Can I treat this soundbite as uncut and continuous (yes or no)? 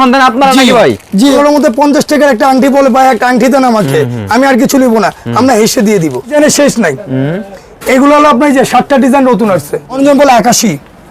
no